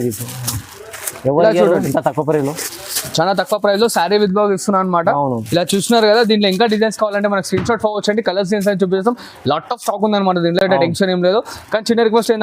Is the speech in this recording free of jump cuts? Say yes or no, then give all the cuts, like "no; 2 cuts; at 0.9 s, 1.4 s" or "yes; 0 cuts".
yes; 0 cuts